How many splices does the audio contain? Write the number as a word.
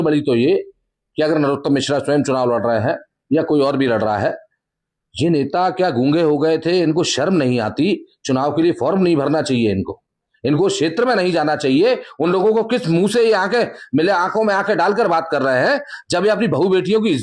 zero